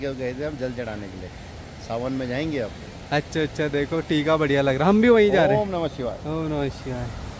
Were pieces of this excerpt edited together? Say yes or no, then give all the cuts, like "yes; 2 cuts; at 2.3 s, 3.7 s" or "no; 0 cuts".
no; 0 cuts